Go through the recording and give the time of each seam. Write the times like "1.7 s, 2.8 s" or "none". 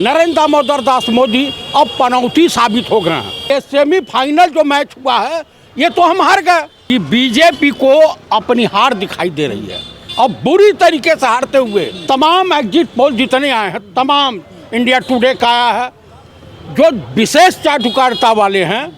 3.4 s, 6.7 s, 11.9 s